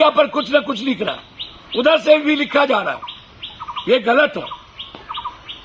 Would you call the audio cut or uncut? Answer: uncut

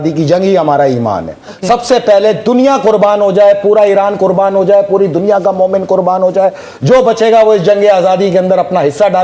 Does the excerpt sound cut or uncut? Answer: uncut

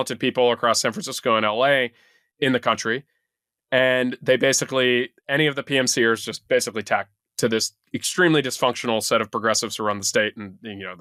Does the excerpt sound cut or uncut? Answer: uncut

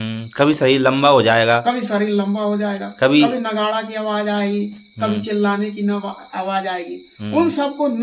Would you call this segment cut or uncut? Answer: uncut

